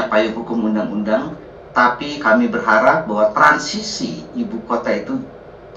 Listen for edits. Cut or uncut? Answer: uncut